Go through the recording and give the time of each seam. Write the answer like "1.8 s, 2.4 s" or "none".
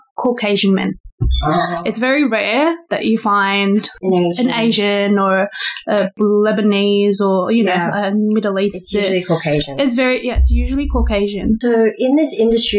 3.9 s, 6.2 s, 11.6 s